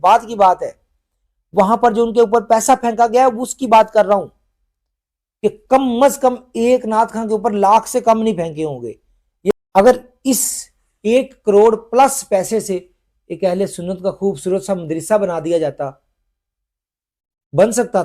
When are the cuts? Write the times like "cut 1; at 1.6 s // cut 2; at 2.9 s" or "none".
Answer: cut 1; at 9.5 s